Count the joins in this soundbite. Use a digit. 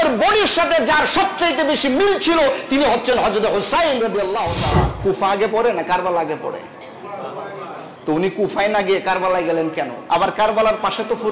2